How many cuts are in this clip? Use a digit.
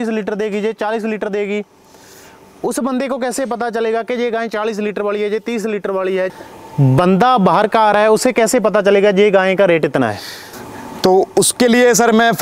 2